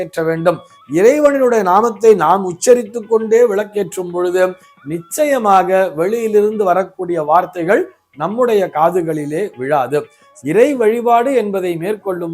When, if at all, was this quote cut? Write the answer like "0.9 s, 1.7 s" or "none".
10.3 s